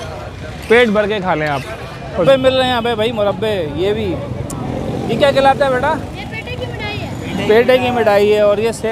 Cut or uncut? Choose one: cut